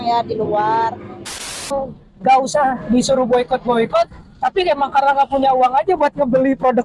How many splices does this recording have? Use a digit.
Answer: 1